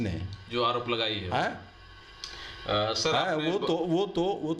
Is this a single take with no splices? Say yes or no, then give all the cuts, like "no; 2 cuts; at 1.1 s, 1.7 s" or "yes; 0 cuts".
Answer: yes; 0 cuts